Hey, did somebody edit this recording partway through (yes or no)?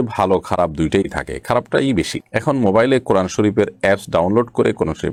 no